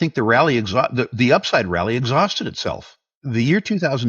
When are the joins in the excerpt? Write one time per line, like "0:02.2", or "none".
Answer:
0:03.2